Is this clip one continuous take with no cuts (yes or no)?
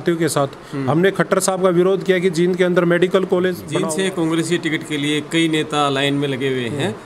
no